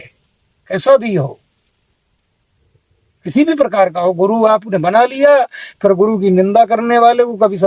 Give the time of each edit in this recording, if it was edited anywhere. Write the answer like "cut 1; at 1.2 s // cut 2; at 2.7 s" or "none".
none